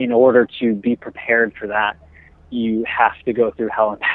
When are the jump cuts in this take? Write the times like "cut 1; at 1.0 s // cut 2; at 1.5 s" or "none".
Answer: none